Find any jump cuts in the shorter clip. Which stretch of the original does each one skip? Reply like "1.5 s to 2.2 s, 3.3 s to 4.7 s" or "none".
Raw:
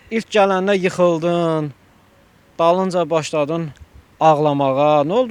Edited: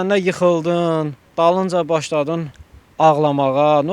1.8 s to 2.4 s